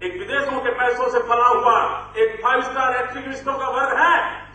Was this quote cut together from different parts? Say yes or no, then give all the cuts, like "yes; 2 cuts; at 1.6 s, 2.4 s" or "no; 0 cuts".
no; 0 cuts